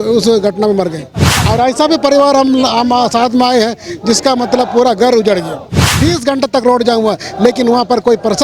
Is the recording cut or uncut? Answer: cut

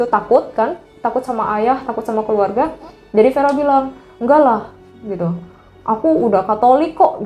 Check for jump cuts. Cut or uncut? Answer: uncut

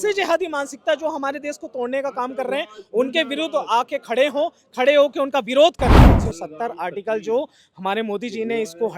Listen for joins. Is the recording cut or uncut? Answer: cut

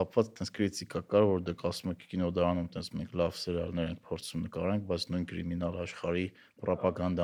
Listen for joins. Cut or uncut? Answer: uncut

